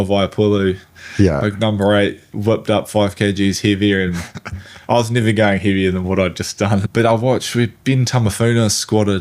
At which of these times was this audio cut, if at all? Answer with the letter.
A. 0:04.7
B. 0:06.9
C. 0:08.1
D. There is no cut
B